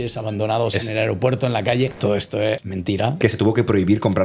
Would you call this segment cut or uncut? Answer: cut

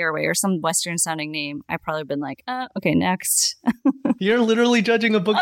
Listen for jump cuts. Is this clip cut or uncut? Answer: uncut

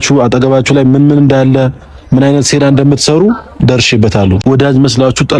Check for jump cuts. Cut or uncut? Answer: cut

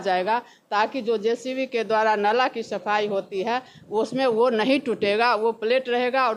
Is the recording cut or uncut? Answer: uncut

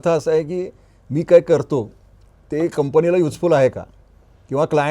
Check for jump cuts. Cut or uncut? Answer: uncut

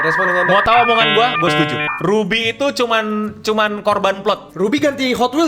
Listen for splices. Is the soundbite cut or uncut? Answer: cut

